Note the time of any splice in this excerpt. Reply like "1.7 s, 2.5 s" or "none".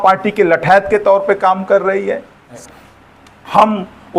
2.6 s

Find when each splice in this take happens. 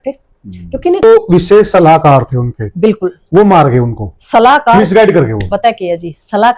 1.0 s

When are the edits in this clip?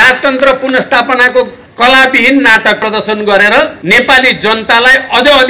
1.6 s, 2.8 s, 3.8 s

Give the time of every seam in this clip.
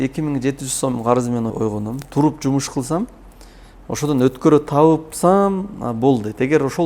1.5 s

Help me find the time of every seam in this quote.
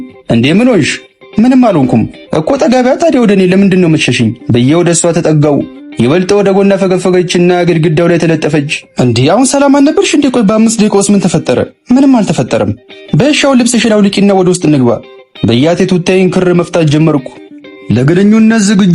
17.7 s

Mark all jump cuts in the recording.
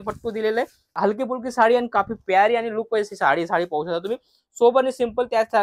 0.9 s

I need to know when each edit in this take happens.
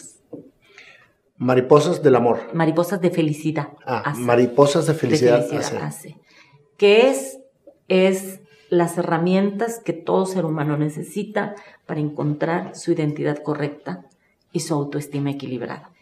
none

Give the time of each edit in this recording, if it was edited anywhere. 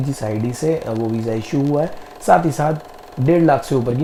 none

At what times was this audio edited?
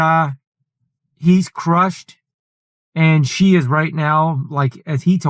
none

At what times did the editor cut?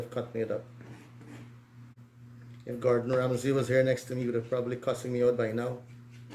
1.9 s

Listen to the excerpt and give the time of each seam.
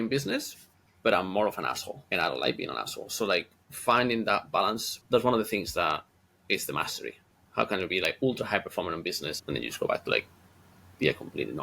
1.9 s, 4.9 s, 7.4 s, 9.3 s

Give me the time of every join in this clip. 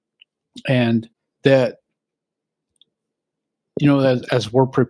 1.2 s

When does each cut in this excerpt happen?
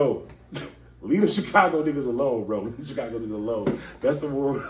none

